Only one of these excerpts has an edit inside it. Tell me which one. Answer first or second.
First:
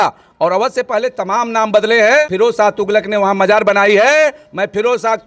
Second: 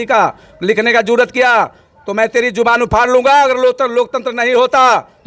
first